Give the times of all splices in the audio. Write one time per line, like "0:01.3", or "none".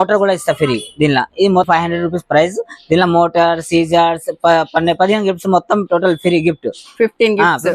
0:01.7